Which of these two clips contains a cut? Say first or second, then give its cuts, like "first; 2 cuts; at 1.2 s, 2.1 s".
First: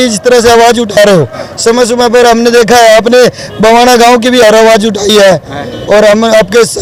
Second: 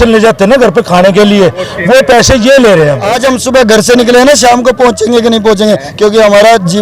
second; 1 cut; at 3.1 s